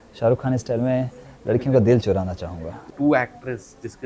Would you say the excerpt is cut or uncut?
cut